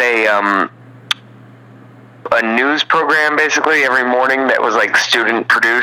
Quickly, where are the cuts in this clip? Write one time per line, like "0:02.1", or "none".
0:02.3